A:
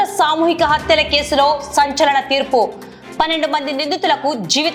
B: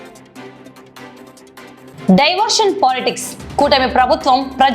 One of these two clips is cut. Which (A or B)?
B